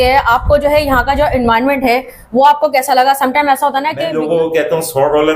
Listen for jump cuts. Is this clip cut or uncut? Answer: cut